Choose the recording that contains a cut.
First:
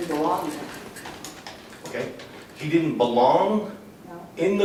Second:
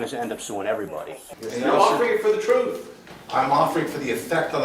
second; 1 cut; at 1.3 s

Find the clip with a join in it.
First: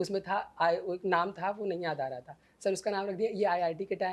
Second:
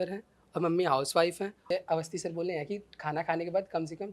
second; 1 cut; at 1.6 s

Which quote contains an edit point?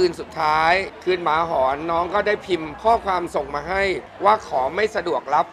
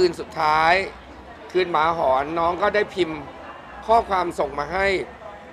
first; 3 cuts; at 0.9 s, 2.7 s, 4.1 s

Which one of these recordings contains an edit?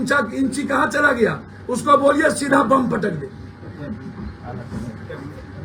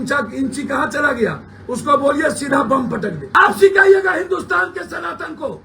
second; 1 cut; at 3.2 s

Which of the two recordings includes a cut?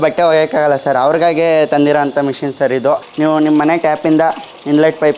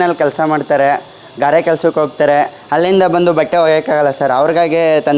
first; 1 cut; at 3.1 s

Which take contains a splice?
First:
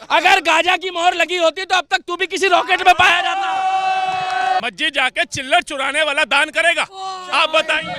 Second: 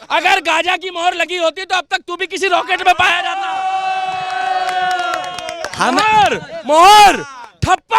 first; 1 cut; at 4.6 s

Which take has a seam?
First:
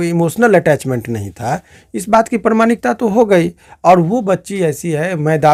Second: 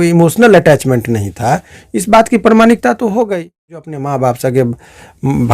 second; 1 cut; at 3.8 s

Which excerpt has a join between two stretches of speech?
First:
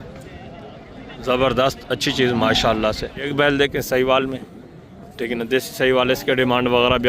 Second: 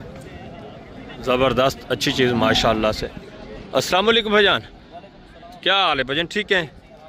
first; 1 cut; at 3.3 s

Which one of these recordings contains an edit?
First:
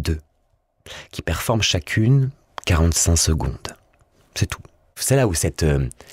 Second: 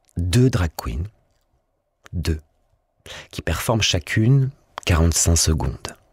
first; 1 cut; at 4.9 s

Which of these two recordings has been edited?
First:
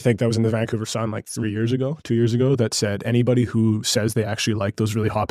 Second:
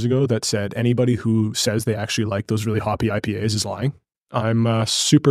second; 1 cut; at 4.1 s

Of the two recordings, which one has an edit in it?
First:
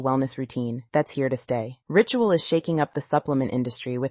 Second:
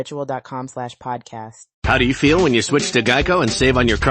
second; 1 cut; at 1.6 s

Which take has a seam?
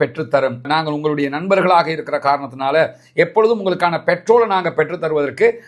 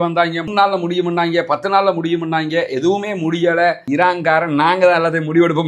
second; 1 cut; at 3.8 s

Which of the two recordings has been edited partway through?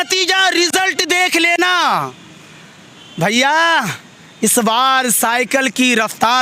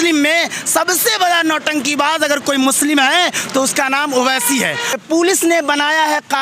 second; 1 cut; at 5.0 s

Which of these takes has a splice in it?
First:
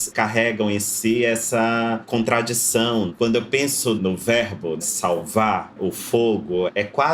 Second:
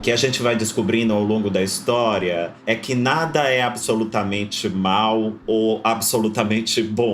second; 1 cut; at 2.5 s

